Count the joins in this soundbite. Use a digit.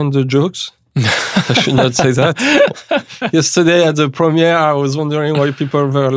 0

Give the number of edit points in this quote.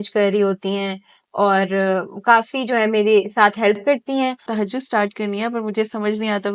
1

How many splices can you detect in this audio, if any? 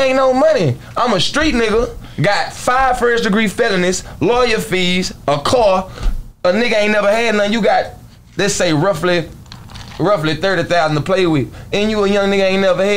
0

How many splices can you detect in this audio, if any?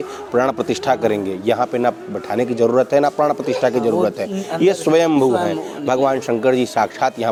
0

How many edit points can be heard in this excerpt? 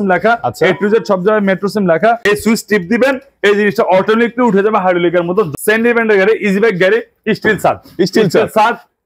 2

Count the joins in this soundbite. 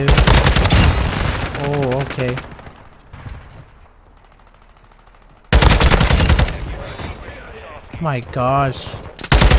1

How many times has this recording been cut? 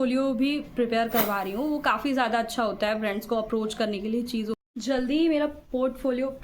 1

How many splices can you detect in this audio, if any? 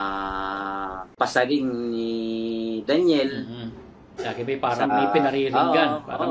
1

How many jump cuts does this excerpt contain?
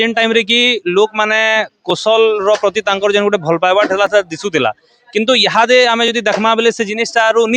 0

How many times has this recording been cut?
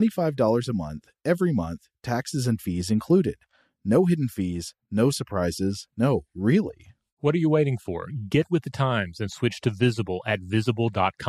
0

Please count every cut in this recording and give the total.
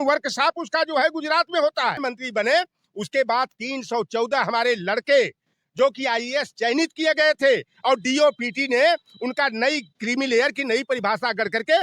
1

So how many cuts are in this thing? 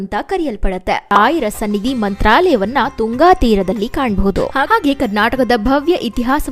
1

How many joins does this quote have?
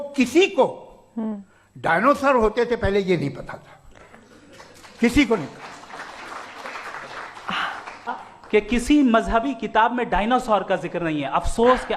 1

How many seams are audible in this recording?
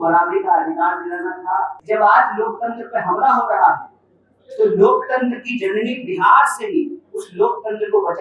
1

